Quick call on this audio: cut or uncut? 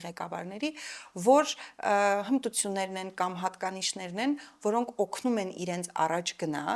uncut